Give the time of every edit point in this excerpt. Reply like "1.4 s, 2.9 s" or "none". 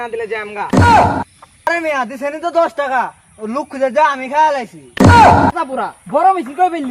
1.7 s, 5.6 s